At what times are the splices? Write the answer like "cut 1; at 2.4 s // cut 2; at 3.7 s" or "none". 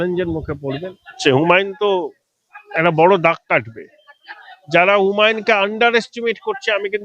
cut 1; at 1.2 s